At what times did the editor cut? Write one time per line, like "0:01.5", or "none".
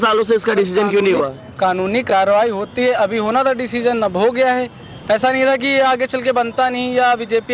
none